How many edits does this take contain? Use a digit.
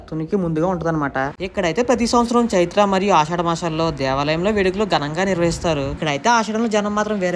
2